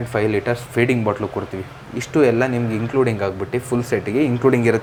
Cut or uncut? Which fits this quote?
uncut